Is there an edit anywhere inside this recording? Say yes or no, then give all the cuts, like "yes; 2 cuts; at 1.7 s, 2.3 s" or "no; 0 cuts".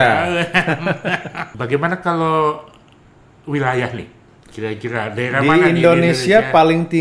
yes; 1 cut; at 1.5 s